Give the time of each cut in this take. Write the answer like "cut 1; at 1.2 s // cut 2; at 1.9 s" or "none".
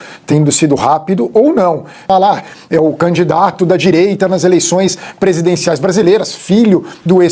cut 1; at 2.0 s